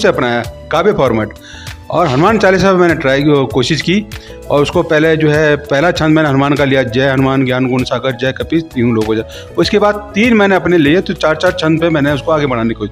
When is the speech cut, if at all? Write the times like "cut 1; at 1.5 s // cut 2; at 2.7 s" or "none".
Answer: none